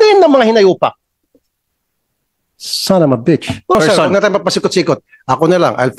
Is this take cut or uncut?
cut